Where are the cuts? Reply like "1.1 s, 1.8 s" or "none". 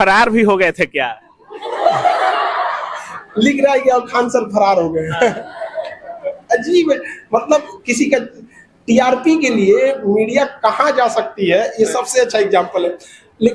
none